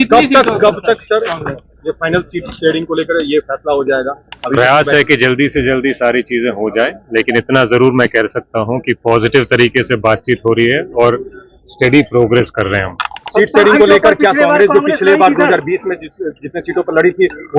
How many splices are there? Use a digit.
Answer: 0